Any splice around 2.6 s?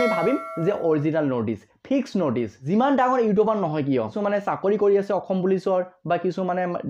yes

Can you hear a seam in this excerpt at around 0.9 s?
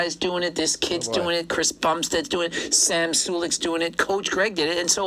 no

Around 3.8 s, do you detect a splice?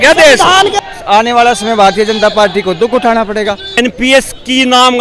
yes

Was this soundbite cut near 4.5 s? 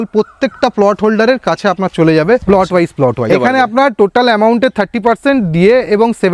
no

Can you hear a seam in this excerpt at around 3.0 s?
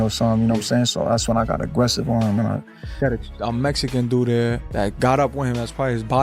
yes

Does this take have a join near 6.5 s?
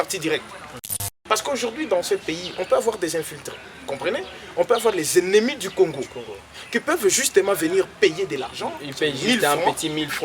no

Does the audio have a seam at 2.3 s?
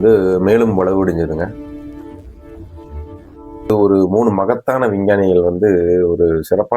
no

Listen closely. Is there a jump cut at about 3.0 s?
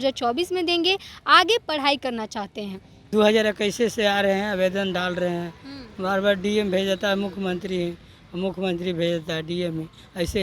yes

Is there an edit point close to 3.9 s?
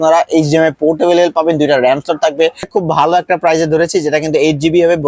no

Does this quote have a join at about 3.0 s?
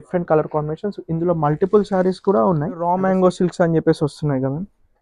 yes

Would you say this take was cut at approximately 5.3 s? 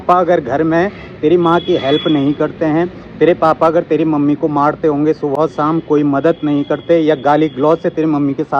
no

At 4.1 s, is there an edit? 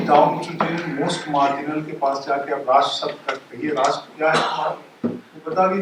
no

